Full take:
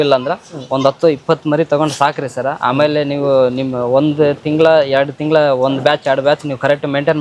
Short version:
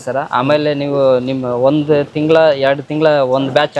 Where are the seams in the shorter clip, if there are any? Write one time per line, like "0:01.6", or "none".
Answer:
none